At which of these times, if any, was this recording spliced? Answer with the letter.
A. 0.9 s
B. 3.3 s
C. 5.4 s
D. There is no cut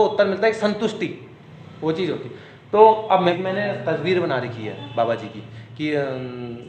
B